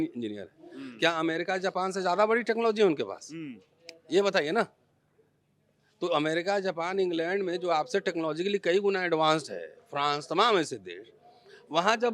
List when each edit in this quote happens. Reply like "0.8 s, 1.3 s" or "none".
none